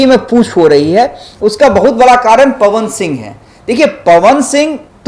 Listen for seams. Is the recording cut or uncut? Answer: uncut